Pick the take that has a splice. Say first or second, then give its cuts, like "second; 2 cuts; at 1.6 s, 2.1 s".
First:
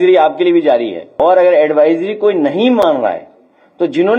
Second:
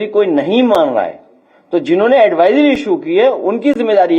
first; 1 cut; at 1.0 s